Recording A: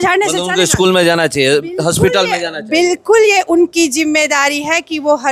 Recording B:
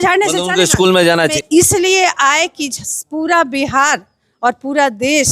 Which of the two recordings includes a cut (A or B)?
B